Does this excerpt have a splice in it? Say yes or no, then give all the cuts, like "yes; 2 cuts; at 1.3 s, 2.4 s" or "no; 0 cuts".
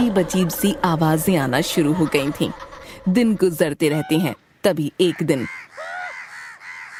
no; 0 cuts